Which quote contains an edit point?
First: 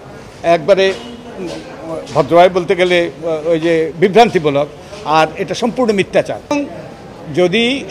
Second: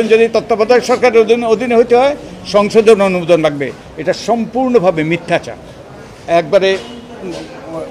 first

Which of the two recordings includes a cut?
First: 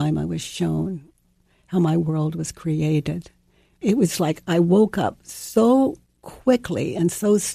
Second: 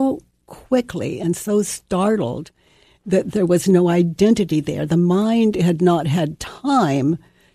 first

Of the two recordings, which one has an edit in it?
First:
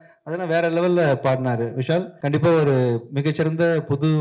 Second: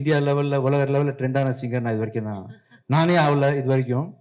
first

